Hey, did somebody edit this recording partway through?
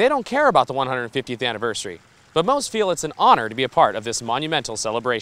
no; 0 cuts

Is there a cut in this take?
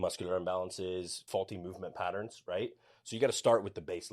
yes; 1 cut; at 1.2 s

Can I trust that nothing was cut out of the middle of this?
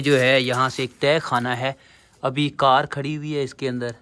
yes; 0 cuts

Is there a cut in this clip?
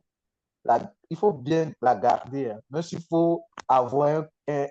no; 0 cuts

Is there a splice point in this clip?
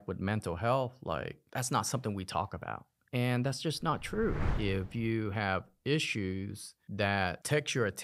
yes; 2 cuts; at 1.4 s, 4.4 s

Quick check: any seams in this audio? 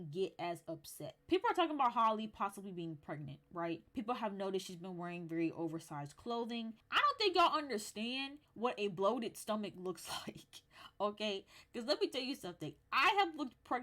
yes; 3 cuts; at 1.2 s, 3.9 s, 6.8 s

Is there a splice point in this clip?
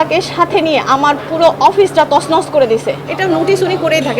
yes; 1 cut; at 3.1 s

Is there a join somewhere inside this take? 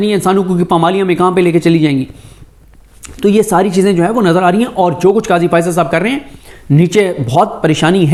no; 0 cuts

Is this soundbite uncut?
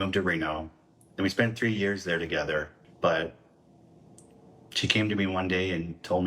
no; 1 cut; at 2.8 s

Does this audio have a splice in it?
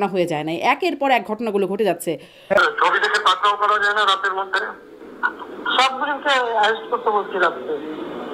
yes; 1 cut; at 2.6 s

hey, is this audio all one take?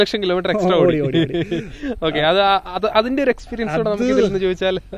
yes; 0 cuts

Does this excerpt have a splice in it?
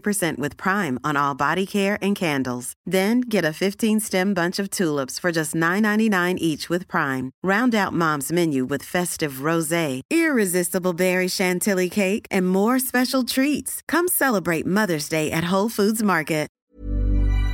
yes; 1 cut; at 16.6 s

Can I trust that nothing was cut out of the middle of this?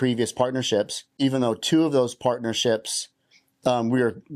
no; 1 cut; at 1.1 s

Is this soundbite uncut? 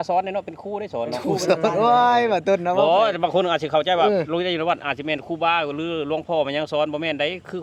yes; 0 cuts

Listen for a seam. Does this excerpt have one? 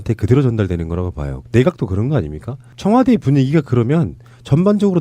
no; 0 cuts

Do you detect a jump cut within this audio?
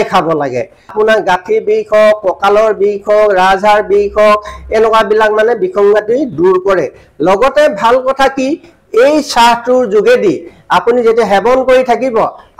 yes; 1 cut; at 0.9 s

